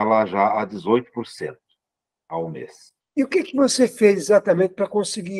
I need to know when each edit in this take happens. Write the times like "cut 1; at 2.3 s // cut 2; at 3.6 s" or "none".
none

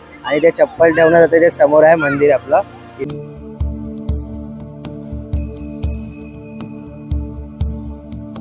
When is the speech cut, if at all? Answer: cut 1; at 3.0 s

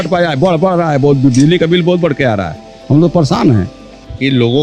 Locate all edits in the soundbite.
none

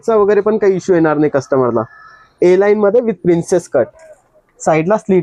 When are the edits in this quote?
none

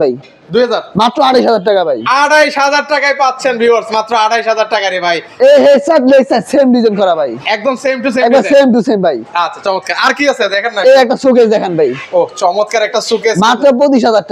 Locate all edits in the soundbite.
none

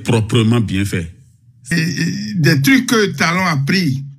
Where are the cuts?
cut 1; at 1.7 s

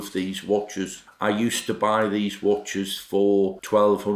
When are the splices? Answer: none

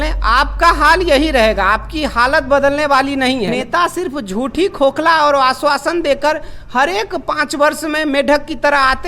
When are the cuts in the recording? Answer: cut 1; at 3.5 s

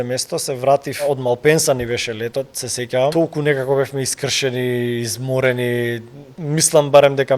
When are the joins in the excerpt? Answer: cut 1; at 1.0 s // cut 2; at 3.1 s // cut 3; at 6.3 s

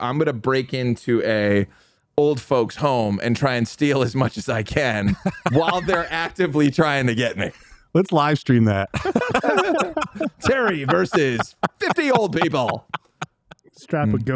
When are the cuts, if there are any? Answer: none

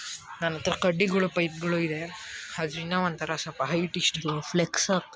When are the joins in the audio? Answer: cut 1; at 4.1 s

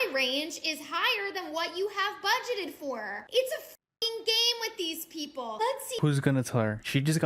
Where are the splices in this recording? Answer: none

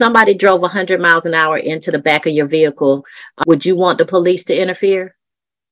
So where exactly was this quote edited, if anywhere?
cut 1; at 3.2 s

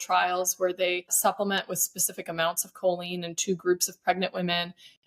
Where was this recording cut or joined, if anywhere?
cut 1; at 1.1 s

